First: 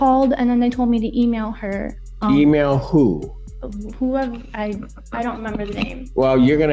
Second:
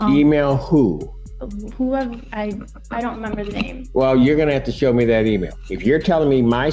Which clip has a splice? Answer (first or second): second